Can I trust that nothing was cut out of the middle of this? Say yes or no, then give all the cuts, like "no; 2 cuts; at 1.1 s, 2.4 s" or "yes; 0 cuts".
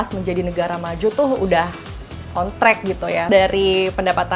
no; 1 cut; at 3.3 s